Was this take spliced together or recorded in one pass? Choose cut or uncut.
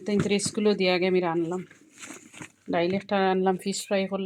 uncut